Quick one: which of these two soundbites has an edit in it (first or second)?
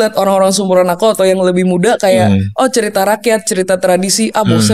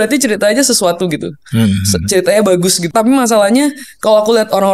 second